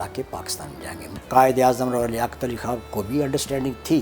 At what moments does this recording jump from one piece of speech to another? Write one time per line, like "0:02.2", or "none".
0:01.1